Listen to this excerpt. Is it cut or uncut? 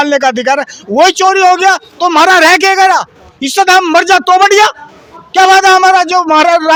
uncut